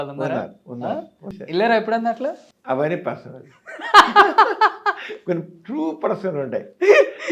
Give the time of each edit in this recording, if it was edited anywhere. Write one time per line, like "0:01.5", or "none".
0:01.4
0:02.5